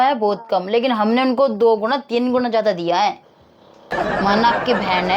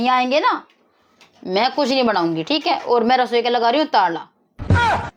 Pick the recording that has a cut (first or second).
first